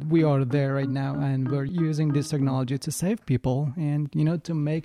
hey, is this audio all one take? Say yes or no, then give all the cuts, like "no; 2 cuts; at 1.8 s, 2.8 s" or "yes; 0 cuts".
no; 1 cut; at 1.7 s